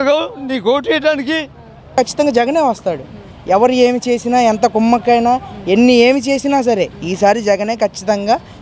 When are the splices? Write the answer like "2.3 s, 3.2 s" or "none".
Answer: 1.9 s